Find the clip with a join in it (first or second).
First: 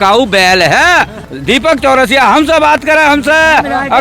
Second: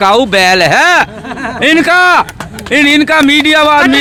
first